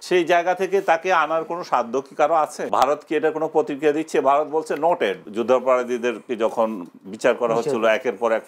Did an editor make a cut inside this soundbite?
yes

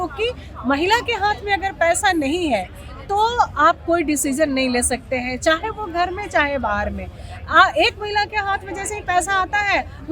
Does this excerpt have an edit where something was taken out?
no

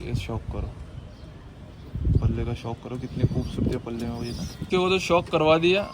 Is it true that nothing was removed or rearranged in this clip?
no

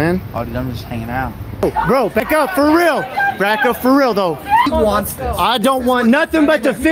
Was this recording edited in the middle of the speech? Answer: yes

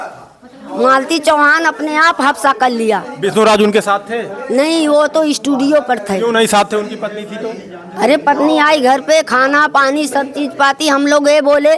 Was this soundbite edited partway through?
no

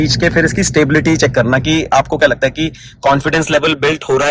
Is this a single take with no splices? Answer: yes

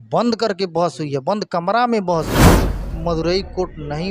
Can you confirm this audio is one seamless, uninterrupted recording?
no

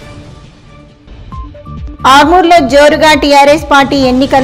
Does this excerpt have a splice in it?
yes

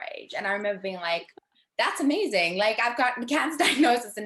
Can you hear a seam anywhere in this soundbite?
no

